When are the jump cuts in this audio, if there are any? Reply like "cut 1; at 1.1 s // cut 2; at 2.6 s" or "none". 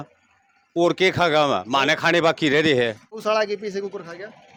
none